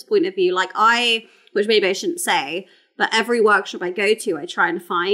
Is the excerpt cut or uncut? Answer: uncut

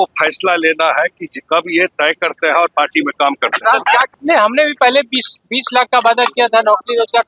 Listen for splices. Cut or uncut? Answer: cut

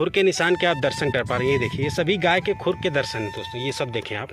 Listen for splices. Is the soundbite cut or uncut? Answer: uncut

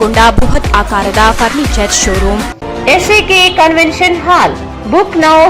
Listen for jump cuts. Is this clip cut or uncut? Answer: uncut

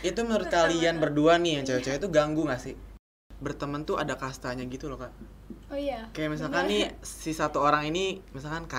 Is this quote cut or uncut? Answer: cut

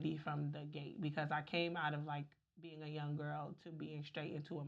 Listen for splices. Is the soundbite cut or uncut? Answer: uncut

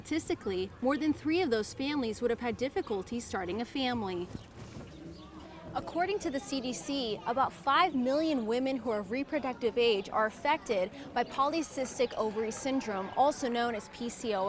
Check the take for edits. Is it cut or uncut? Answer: uncut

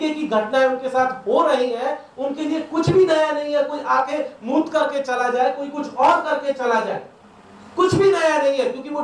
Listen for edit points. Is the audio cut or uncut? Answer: uncut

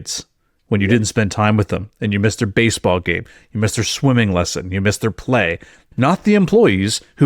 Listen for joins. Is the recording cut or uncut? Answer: cut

